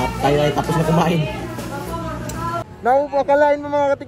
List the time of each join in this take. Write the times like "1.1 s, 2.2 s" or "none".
2.6 s